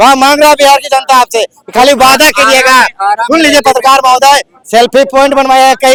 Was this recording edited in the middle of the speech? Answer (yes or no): no